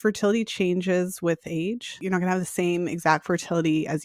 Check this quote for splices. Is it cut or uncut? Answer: cut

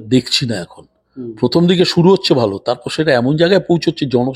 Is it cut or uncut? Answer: uncut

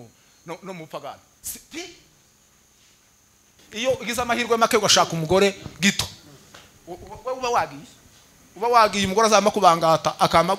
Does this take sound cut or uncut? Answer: cut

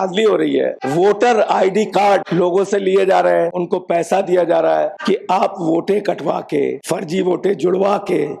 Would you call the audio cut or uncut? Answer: cut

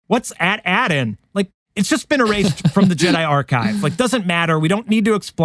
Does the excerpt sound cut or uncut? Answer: uncut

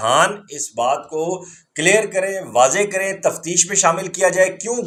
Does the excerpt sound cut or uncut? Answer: uncut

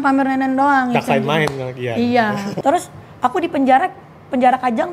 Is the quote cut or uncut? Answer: cut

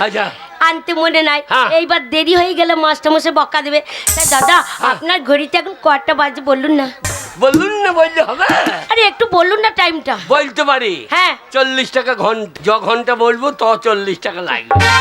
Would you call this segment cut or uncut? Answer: cut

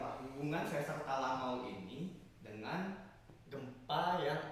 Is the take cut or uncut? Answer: uncut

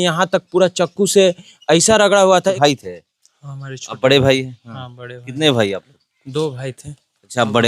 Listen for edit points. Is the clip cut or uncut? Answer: cut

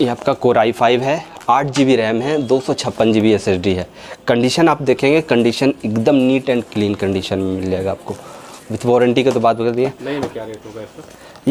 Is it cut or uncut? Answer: uncut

